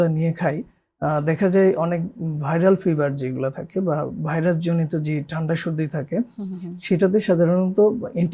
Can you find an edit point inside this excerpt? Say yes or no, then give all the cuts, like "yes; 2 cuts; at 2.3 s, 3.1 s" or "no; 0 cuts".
no; 0 cuts